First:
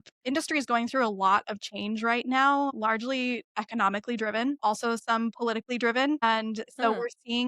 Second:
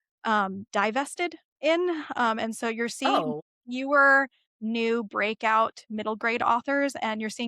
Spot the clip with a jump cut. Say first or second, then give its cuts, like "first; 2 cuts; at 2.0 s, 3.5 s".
first; 3 cuts; at 2.8 s, 4.6 s, 6.2 s